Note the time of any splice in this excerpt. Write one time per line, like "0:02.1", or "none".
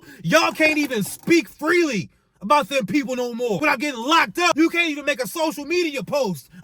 0:03.6
0:04.5